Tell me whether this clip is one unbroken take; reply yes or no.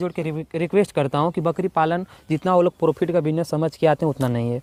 yes